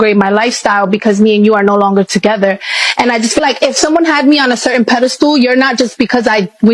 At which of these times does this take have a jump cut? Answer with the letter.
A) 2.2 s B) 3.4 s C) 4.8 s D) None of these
B